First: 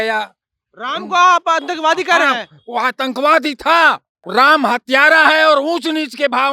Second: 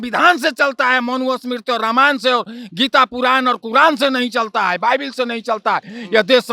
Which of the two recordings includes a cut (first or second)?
first